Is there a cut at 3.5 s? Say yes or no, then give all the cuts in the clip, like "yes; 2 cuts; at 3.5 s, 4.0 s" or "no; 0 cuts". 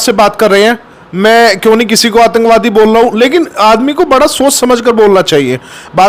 no; 0 cuts